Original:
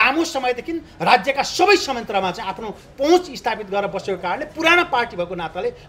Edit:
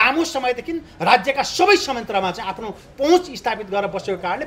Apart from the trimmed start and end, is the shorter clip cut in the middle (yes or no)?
no